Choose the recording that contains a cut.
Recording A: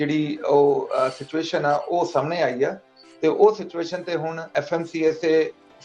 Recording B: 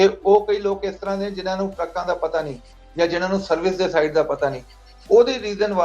A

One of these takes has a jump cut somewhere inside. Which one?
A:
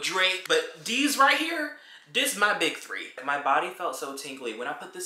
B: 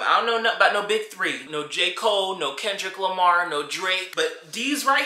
A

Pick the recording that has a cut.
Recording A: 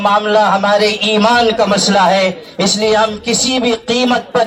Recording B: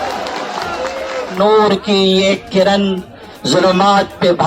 B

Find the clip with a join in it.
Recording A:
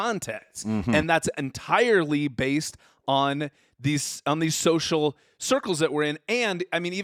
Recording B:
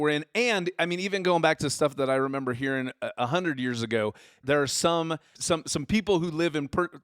B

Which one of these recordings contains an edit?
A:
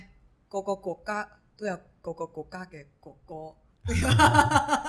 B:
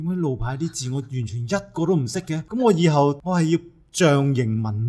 B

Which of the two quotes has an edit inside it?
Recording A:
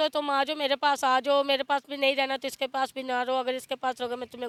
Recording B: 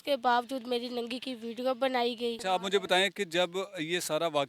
B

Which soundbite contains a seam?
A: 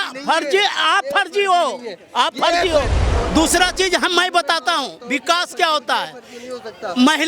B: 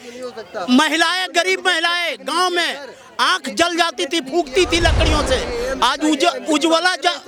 A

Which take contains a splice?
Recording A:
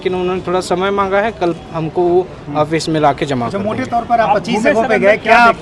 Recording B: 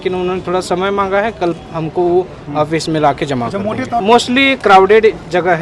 B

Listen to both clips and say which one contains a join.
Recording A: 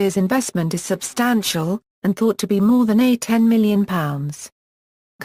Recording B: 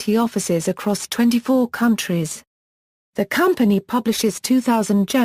B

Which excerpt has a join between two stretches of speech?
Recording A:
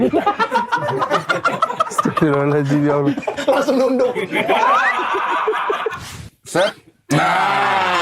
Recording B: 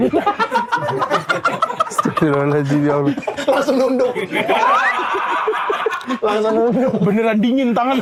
A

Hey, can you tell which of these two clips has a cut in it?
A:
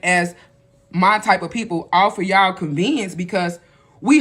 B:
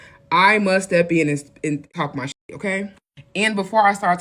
B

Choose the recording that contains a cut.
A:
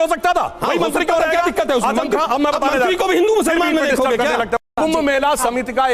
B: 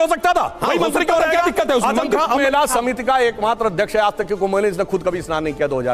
B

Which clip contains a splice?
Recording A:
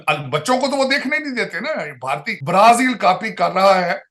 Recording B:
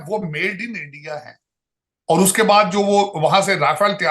A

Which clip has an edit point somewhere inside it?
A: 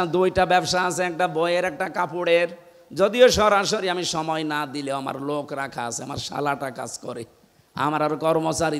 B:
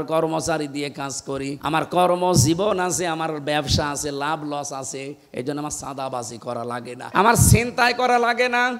B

